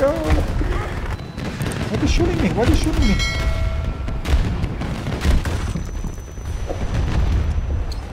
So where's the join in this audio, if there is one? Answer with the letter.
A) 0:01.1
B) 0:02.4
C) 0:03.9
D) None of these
A